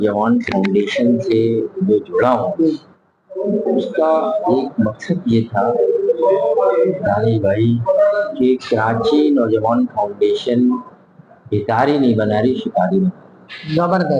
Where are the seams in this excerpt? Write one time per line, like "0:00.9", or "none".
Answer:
none